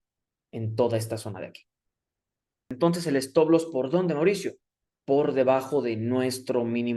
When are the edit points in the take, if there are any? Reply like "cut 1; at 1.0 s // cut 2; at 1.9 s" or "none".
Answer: cut 1; at 2.7 s